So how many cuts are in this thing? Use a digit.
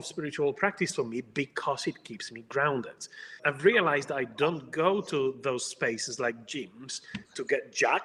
0